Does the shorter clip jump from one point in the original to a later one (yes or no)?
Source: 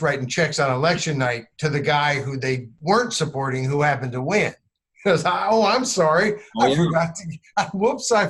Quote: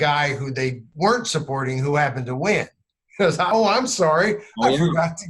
yes